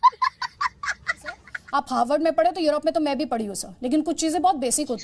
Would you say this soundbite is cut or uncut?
cut